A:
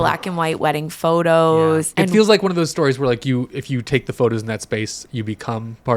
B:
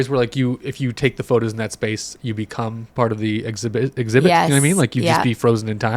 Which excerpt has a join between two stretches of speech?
A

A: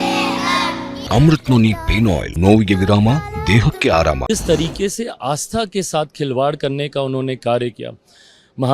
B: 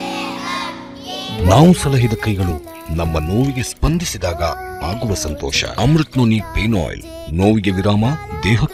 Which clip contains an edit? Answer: A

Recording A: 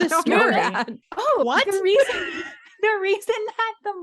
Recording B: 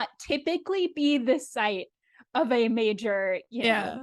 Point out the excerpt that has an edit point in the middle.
A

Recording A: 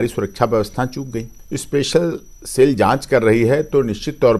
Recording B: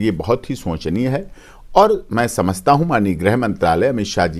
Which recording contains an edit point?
A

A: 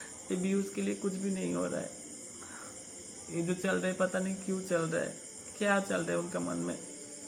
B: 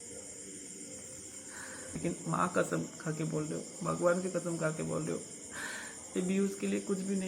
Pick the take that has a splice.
B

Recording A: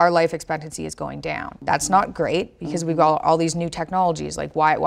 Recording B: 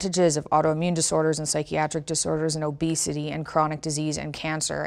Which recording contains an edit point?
A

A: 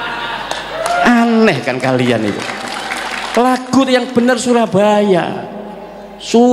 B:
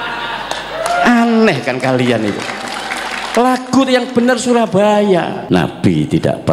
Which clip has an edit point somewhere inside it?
B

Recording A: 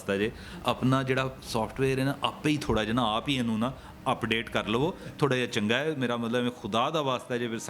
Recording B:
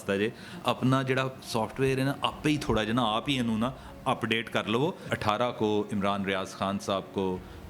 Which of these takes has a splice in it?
B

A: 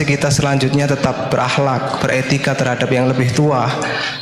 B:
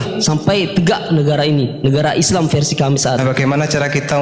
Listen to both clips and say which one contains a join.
B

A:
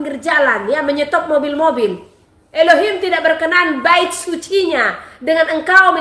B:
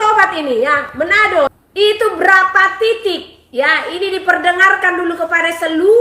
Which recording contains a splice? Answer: B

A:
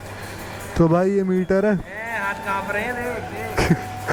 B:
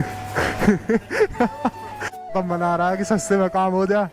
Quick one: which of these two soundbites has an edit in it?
B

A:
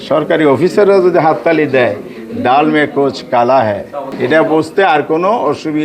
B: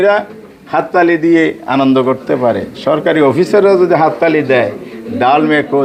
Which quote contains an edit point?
A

